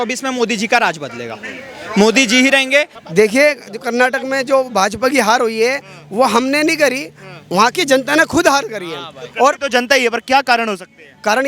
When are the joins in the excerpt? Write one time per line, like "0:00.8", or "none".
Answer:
0:03.0